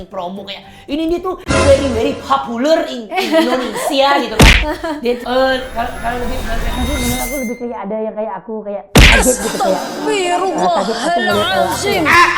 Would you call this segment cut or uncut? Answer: cut